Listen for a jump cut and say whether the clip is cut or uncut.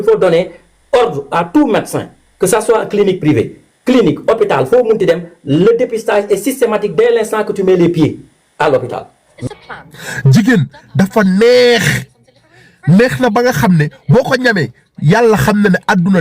cut